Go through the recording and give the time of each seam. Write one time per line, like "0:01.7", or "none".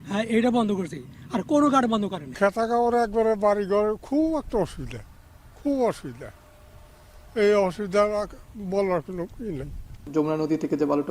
0:02.2
0:10.0